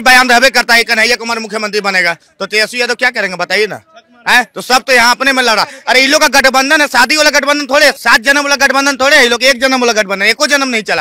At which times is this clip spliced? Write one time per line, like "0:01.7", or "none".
none